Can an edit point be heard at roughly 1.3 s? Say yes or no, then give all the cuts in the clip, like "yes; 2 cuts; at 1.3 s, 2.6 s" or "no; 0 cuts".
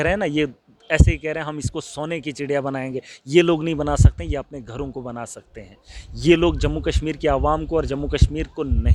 no; 0 cuts